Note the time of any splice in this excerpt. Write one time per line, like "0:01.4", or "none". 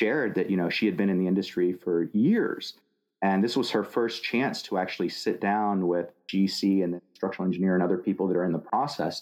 none